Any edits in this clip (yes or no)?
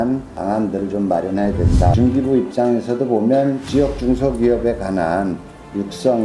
yes